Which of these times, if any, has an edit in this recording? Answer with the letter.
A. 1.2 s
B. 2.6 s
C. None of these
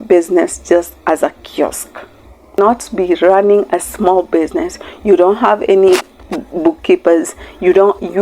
B